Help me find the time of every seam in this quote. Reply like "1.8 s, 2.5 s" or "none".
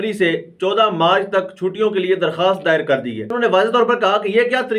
3.4 s